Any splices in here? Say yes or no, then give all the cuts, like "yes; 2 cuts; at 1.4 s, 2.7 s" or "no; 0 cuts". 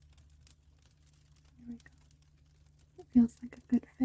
no; 0 cuts